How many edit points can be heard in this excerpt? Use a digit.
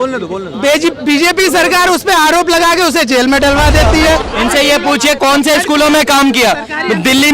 1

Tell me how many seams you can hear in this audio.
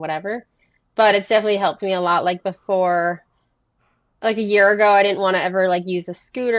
0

